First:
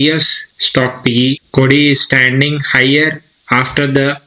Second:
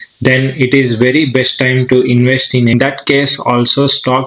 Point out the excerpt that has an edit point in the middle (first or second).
second